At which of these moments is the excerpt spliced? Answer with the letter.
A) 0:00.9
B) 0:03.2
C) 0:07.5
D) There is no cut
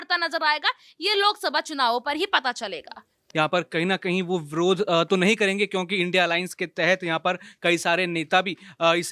B